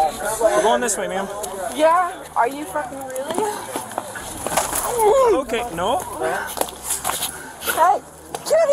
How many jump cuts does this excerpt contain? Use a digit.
0